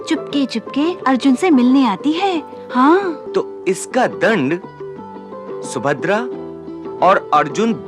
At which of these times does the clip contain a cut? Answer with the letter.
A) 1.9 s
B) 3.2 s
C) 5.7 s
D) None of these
B